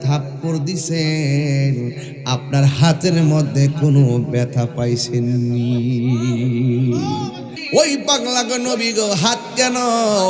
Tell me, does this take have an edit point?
yes; 1 cut; at 7.5 s

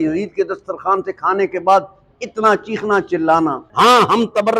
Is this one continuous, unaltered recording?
no; 1 cut; at 3.6 s

